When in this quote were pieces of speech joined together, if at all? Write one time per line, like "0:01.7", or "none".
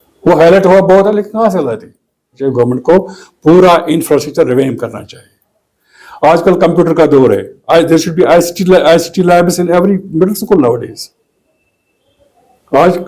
0:02.3

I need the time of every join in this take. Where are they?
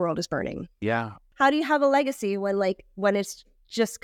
0:01.2

